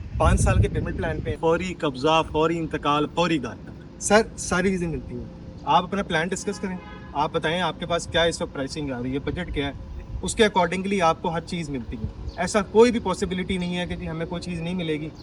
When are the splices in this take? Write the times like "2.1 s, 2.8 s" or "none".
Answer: 1.3 s